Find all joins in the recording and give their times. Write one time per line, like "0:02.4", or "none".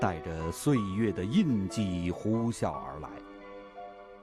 0:02.6